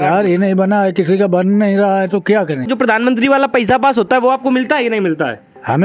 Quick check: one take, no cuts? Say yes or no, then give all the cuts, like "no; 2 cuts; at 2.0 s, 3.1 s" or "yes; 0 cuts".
no; 1 cut; at 2.7 s